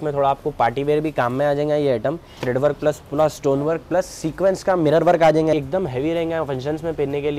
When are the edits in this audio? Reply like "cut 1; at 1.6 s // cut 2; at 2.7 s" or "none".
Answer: cut 1; at 2.3 s // cut 2; at 5.5 s